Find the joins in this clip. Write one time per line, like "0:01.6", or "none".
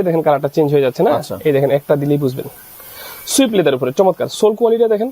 none

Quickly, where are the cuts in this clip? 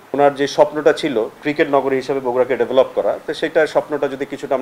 0:01.4

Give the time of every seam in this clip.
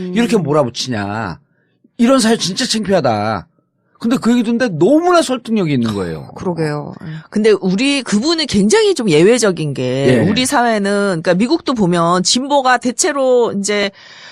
none

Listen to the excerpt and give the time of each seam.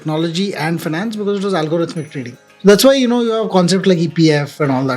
0:02.4

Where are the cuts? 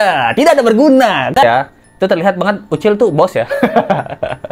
0:01.4

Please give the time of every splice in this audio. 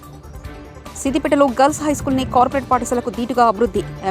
0:01.0

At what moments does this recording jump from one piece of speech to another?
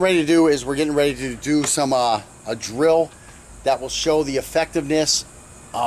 none

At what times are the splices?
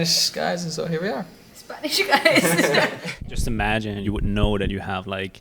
0:03.0
0:04.0

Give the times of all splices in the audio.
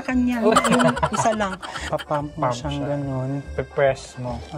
0:01.8

